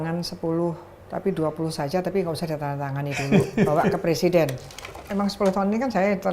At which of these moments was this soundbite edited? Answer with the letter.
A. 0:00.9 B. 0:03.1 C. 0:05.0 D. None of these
C